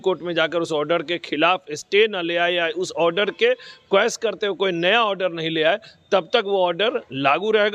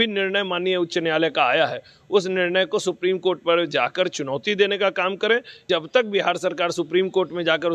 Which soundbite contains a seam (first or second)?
second